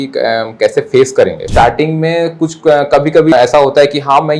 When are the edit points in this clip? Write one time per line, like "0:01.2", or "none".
0:01.4
0:03.3